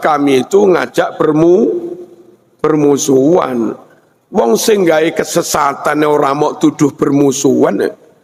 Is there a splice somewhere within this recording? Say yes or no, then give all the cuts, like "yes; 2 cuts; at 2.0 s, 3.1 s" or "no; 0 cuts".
no; 0 cuts